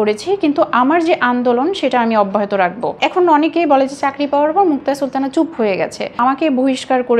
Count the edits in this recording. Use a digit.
2